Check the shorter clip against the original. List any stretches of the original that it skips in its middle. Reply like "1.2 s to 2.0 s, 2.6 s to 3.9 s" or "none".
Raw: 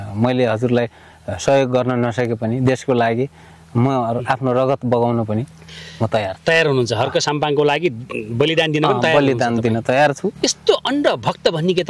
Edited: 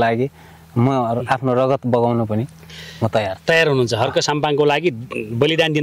none